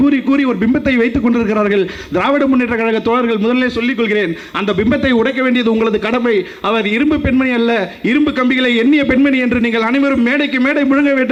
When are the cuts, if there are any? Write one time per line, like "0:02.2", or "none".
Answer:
none